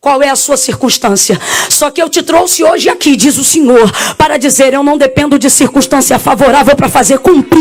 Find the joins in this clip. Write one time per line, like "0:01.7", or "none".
none

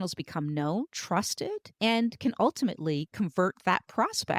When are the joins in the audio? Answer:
0:01.3

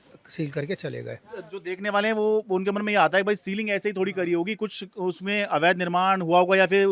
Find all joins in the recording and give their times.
none

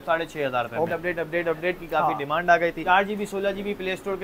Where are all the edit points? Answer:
0:00.9
0:02.8

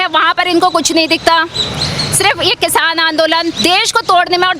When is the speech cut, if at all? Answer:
none

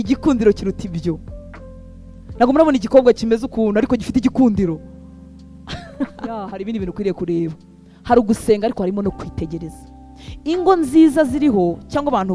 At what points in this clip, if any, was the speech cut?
0:06.5

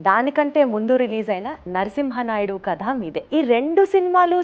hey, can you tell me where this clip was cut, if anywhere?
0:03.2

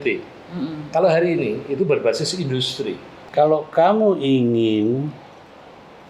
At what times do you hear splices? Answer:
0:03.1

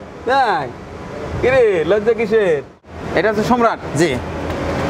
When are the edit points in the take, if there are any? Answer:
0:02.8

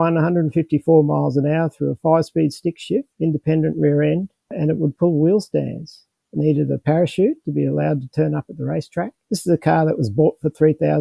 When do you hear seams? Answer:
0:03.1
0:06.4

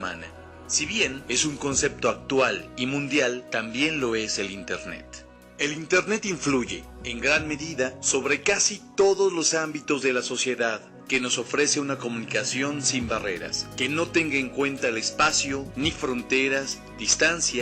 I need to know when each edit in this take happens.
0:06.8

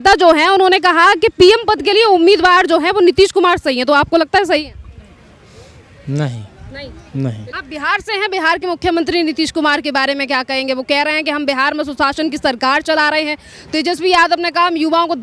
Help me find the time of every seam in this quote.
0:07.5

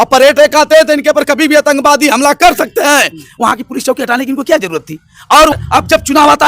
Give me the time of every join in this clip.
0:05.5

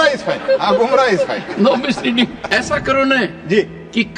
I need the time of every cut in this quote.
0:02.5

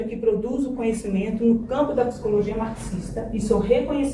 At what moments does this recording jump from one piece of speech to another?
none

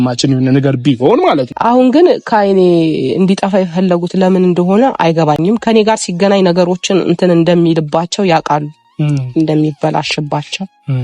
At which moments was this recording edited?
0:01.5

